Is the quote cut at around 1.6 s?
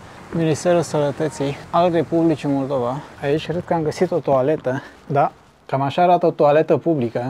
no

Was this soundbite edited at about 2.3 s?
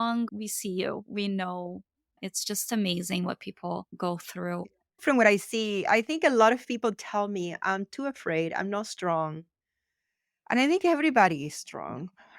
yes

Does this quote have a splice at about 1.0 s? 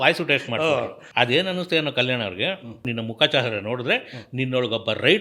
yes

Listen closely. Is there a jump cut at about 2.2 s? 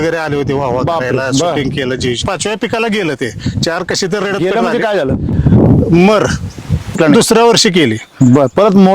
yes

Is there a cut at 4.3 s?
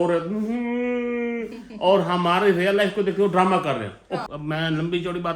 yes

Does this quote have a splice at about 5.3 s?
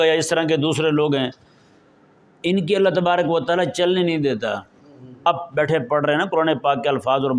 yes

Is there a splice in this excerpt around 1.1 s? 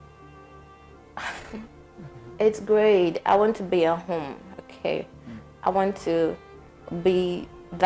yes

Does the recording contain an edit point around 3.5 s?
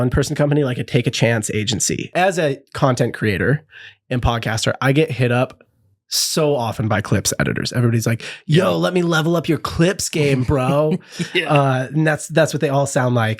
no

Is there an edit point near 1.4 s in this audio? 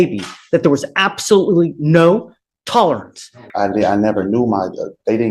no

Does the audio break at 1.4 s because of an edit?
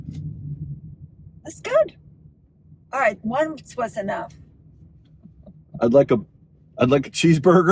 no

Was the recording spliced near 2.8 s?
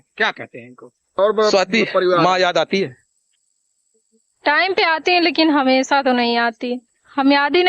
no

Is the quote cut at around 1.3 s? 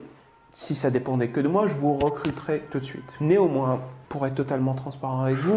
no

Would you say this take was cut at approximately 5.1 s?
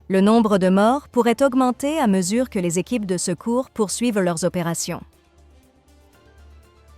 yes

